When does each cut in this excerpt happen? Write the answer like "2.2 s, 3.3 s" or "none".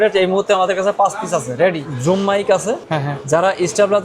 1.8 s, 2.9 s